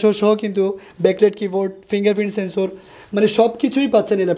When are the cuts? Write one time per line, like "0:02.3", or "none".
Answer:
none